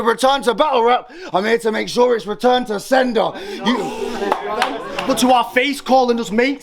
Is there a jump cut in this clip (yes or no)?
yes